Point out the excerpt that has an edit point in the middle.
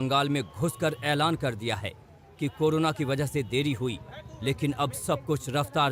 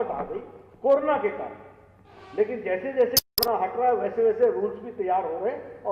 second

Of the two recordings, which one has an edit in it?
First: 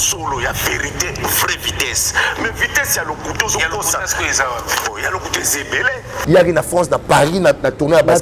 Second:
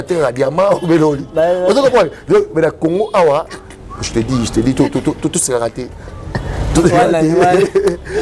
first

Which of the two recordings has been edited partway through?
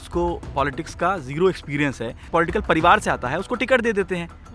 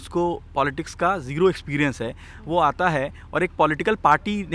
first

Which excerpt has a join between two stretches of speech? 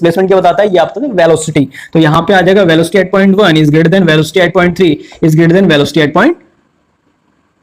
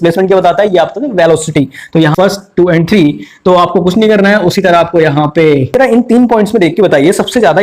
second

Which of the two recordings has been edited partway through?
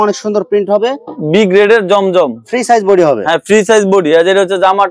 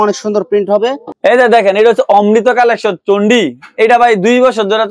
second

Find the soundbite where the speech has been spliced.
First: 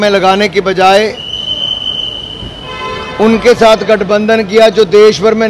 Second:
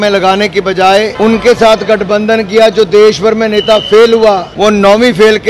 second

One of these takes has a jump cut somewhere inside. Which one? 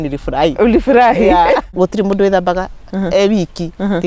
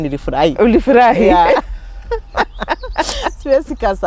first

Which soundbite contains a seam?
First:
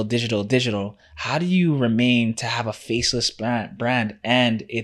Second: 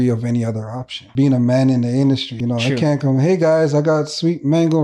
second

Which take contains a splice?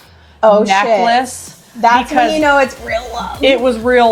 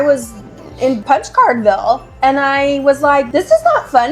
second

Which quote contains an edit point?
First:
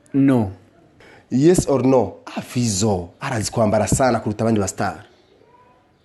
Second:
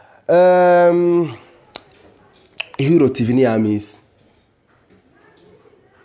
first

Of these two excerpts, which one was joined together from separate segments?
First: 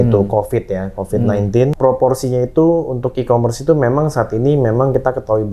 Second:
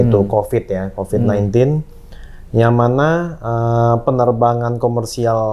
first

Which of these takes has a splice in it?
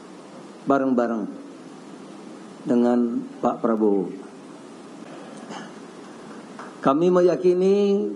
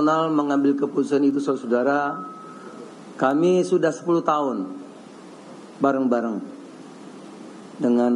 first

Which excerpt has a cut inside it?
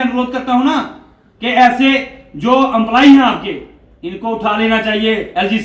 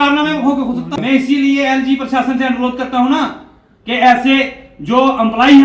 second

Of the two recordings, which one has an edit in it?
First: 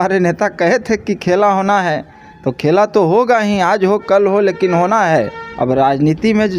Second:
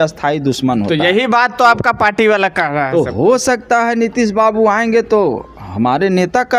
first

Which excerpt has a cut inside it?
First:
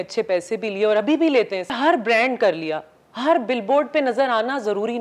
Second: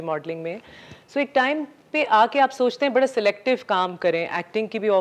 first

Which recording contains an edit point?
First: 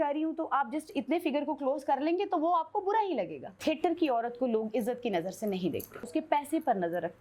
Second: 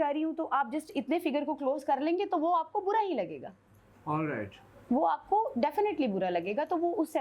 first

